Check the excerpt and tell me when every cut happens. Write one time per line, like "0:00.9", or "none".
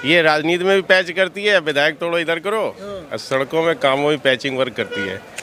none

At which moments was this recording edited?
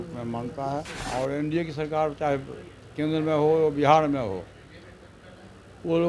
0:01.1

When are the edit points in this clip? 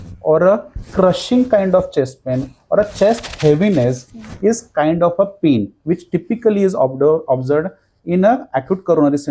none

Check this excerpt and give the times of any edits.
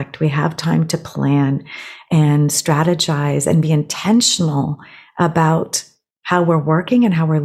none

